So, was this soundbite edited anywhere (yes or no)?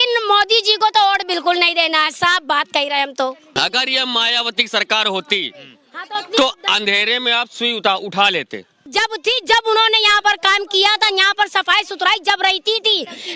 yes